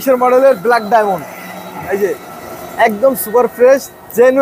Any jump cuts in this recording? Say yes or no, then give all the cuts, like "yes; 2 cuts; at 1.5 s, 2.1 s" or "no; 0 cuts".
no; 0 cuts